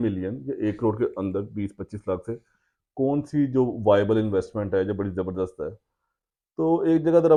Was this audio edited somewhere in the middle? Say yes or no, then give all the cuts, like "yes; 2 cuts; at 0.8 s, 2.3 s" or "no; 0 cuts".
no; 0 cuts